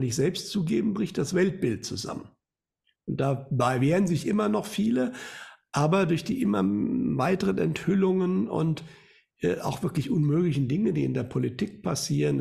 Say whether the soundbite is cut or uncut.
uncut